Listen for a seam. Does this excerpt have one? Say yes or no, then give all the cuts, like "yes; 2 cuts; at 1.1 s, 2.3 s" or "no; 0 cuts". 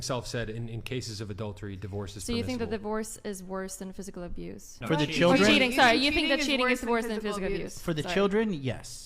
yes; 1 cut; at 4.7 s